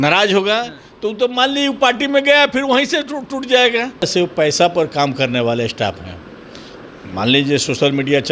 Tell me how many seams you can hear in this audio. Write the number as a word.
one